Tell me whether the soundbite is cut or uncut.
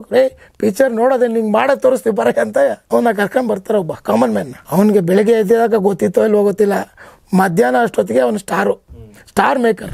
cut